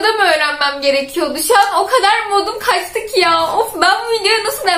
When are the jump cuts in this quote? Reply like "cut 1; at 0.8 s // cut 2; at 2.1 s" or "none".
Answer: none

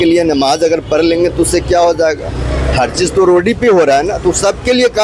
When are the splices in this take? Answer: none

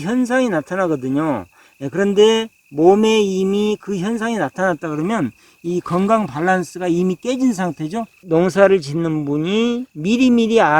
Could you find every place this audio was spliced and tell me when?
cut 1; at 8.2 s

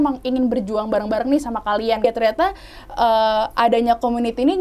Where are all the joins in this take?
cut 1; at 2.0 s

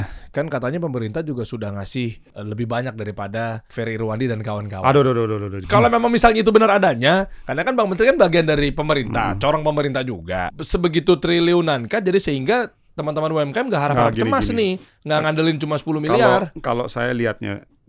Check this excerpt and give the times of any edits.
cut 1; at 2.3 s // cut 2; at 3.7 s // cut 3; at 5.5 s // cut 4; at 10.5 s

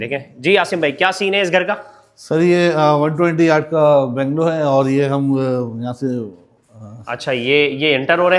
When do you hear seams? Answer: none

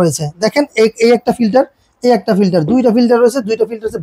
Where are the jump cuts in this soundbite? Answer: none

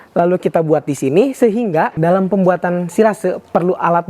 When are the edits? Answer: cut 1; at 1.9 s

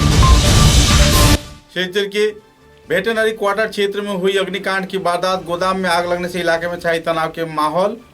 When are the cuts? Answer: cut 1; at 1.5 s

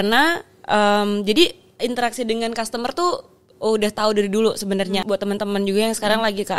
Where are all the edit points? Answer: cut 1; at 5.0 s

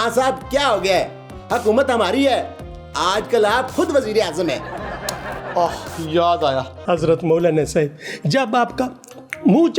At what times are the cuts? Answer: cut 1; at 6.7 s

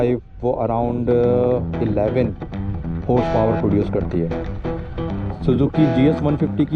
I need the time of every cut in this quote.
none

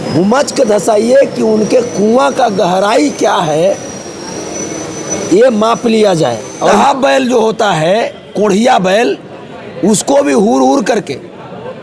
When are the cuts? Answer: cut 1; at 6.7 s

